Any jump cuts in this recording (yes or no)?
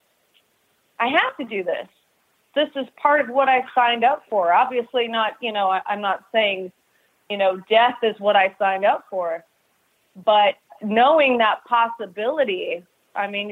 yes